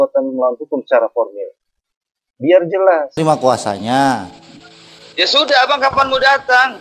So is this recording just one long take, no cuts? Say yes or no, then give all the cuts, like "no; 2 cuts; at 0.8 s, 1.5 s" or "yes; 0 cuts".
no; 1 cut; at 3.2 s